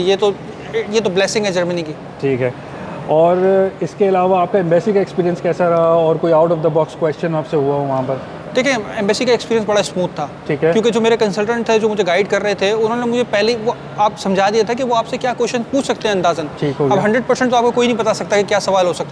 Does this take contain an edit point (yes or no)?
no